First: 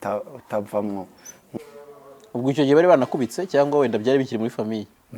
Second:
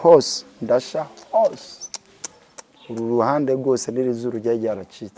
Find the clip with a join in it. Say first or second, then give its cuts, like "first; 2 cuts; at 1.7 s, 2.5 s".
first; 1 cut; at 1.5 s